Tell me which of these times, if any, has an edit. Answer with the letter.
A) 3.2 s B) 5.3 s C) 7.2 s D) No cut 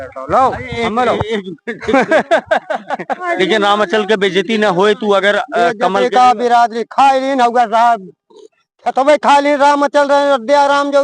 A